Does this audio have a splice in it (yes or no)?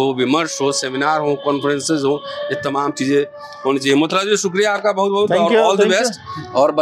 no